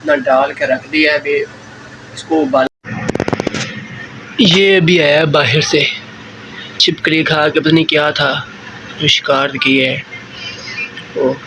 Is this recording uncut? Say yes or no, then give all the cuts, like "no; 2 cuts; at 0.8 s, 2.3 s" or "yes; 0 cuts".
no; 1 cut; at 2.7 s